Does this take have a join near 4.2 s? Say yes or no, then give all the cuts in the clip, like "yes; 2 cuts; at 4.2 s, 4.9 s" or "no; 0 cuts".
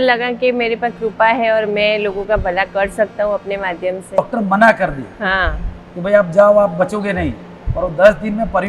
yes; 1 cut; at 4.2 s